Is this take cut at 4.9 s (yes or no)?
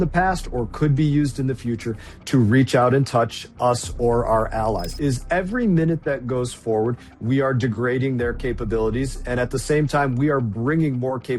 yes